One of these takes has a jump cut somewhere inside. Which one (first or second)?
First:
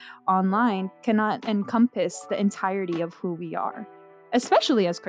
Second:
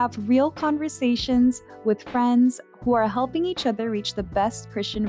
first